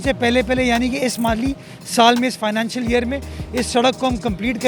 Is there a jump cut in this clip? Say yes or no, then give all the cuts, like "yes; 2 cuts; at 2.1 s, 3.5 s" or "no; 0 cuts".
no; 0 cuts